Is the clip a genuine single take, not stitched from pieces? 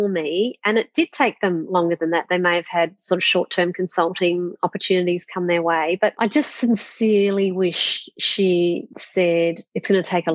yes; 0 cuts

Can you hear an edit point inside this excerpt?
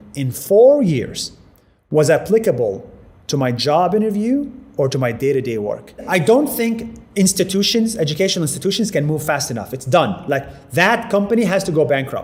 no; 0 cuts

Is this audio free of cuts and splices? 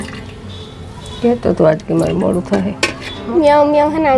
no; 1 cut; at 3.3 s

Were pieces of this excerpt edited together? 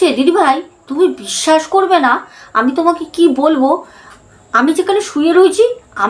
no; 0 cuts

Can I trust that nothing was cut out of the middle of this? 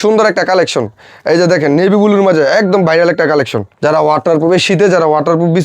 no; 1 cut; at 3.6 s

